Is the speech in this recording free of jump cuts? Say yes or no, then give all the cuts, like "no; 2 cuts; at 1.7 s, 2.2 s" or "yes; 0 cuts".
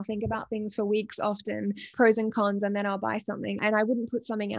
no; 2 cuts; at 1.8 s, 3.6 s